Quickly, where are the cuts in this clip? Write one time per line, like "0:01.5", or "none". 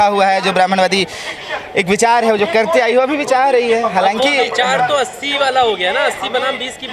none